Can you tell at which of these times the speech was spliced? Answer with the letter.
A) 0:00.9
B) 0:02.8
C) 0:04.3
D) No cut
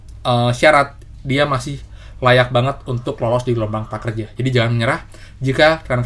D